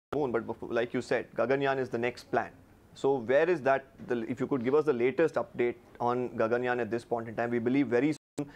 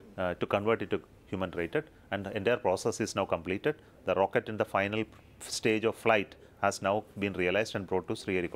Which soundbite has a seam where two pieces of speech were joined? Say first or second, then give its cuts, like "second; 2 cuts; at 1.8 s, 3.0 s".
second; 1 cut; at 2.5 s